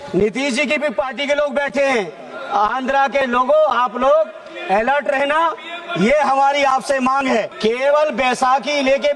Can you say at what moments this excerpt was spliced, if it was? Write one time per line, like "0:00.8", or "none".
0:07.5

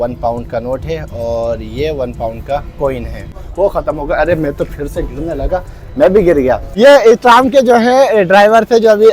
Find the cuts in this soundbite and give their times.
0:03.4
0:06.7

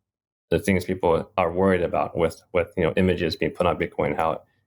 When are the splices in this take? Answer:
0:01.3

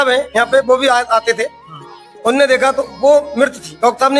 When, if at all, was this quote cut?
none

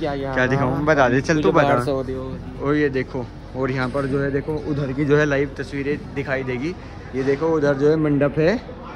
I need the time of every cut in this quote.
none

